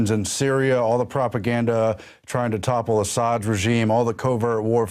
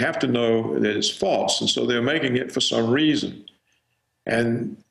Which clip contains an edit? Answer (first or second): first